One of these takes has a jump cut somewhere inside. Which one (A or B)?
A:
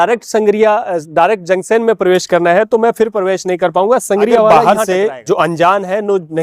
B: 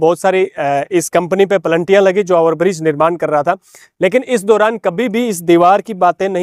A